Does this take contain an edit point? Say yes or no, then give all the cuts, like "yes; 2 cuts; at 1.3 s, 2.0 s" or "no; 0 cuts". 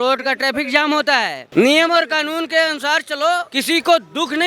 yes; 2 cuts; at 1.4 s, 3.5 s